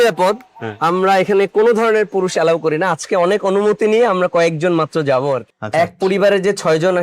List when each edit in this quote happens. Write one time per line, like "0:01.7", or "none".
0:05.5